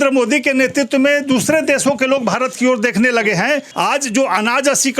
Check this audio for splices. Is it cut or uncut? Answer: cut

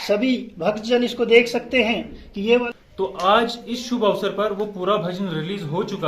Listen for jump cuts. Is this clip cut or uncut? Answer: cut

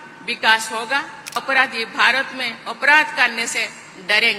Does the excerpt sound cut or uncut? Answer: cut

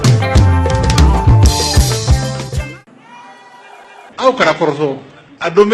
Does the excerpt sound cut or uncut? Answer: cut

